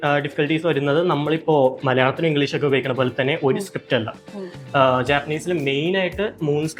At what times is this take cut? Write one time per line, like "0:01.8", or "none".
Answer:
none